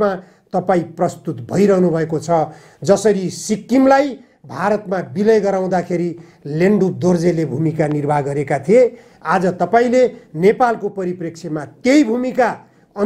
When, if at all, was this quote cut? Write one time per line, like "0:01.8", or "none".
none